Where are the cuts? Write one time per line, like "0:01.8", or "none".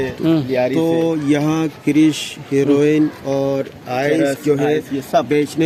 none